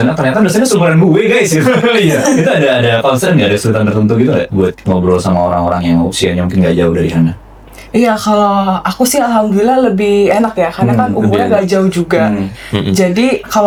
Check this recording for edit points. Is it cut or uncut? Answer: uncut